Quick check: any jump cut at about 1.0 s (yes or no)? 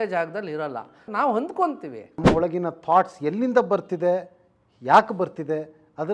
yes